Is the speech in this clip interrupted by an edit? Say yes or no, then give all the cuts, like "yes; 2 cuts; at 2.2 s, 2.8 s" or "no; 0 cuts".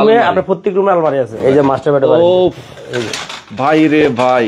yes; 1 cut; at 1.3 s